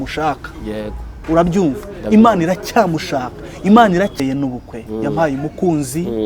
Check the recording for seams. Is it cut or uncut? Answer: cut